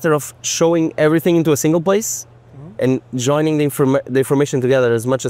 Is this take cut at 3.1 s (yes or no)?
no